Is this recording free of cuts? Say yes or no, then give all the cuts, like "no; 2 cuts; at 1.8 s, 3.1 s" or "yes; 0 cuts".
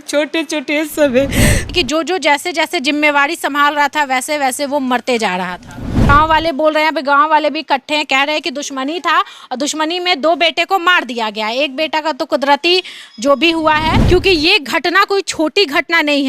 no; 3 cuts; at 1.6 s, 6.1 s, 14.0 s